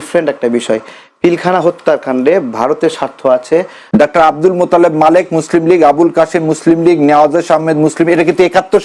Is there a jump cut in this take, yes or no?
yes